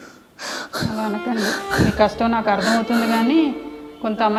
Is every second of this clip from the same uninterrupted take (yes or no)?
yes